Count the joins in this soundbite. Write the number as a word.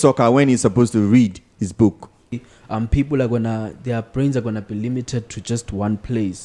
one